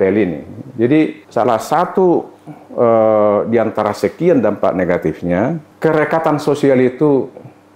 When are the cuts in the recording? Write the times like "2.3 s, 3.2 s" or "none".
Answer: 1.2 s, 5.7 s